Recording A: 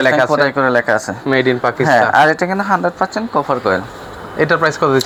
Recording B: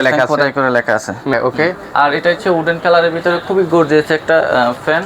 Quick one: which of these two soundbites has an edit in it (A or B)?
B